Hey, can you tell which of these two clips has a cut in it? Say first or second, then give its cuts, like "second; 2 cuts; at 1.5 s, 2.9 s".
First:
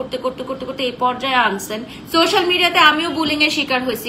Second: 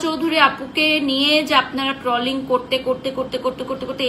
first; 1 cut; at 1.9 s